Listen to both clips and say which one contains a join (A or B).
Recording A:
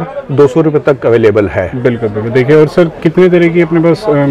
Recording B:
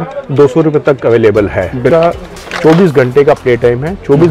B